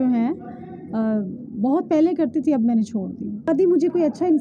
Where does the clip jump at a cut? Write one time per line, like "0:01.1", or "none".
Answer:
0:03.5